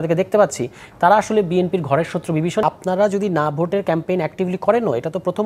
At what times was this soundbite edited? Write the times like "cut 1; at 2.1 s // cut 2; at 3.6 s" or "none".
cut 1; at 2.6 s